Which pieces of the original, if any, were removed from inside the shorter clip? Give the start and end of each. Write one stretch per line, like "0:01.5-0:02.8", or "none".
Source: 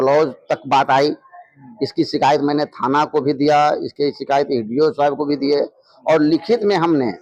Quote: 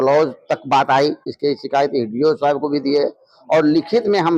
0:01.3-0:03.9